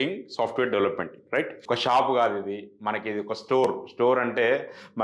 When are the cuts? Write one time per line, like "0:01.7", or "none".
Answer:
0:01.6